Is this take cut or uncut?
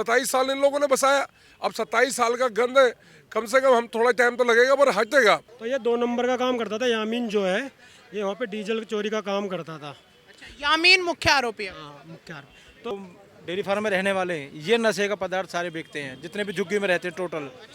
cut